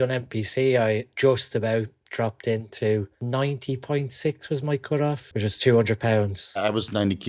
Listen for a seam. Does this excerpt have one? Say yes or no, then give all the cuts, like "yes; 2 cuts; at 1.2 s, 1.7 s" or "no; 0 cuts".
yes; 4 cuts; at 1.1 s, 3.6 s, 5.7 s, 6.6 s